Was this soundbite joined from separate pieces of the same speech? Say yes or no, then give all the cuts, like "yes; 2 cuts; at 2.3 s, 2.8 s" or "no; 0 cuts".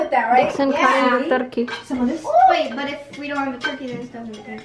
no; 0 cuts